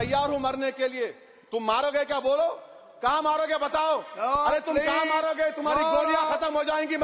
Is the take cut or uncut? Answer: uncut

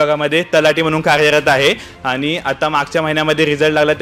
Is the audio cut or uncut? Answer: uncut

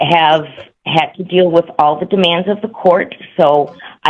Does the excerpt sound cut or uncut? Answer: uncut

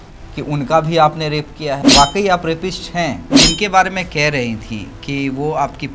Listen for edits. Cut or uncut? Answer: cut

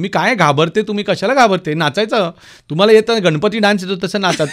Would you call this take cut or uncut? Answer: uncut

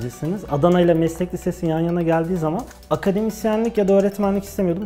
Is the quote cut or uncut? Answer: cut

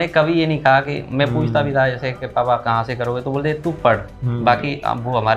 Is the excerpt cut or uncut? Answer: uncut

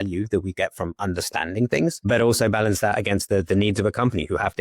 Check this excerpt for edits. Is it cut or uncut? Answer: cut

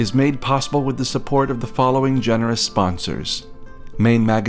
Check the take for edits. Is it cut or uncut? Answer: uncut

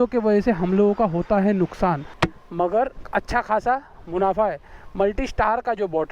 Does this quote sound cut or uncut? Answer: cut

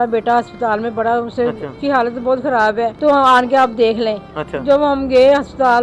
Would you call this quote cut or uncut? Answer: cut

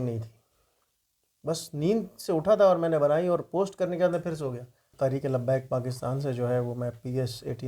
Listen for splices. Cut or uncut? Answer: cut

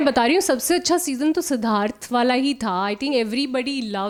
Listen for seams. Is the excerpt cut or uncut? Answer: uncut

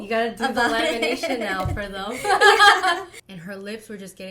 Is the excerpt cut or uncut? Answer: cut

